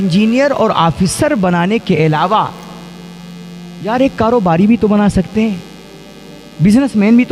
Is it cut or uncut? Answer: uncut